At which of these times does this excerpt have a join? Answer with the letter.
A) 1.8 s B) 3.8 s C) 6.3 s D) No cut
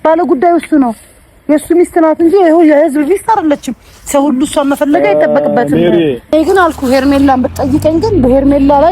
C